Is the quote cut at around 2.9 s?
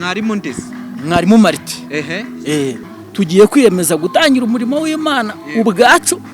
yes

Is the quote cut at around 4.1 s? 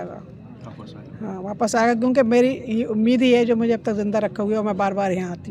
no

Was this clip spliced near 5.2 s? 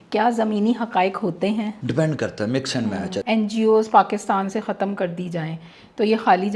no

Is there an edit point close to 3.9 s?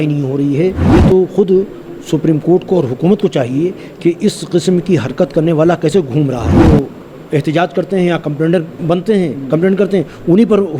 no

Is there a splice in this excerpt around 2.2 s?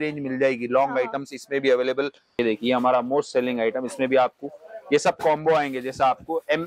yes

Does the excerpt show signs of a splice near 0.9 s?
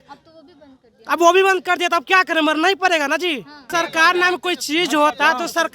no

